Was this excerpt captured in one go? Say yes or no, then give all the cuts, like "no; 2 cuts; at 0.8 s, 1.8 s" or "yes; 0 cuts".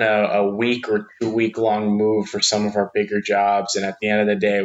yes; 0 cuts